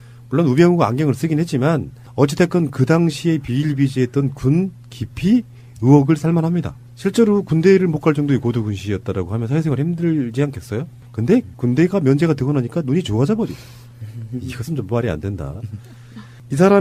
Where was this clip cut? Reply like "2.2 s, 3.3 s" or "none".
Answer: none